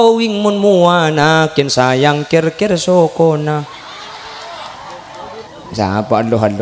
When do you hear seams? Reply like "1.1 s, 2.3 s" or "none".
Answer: 5.5 s